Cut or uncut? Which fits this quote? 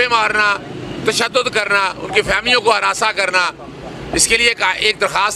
uncut